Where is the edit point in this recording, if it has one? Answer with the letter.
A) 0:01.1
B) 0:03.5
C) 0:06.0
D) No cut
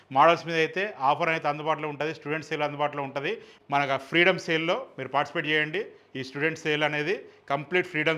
B